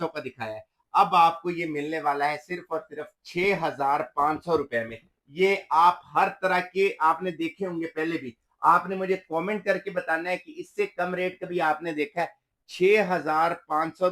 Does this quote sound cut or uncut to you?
uncut